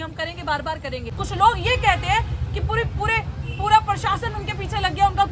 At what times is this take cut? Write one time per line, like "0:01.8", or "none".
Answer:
0:01.2